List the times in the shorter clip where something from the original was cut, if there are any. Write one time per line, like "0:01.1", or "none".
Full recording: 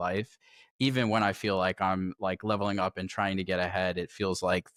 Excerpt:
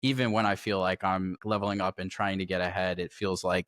0:01.4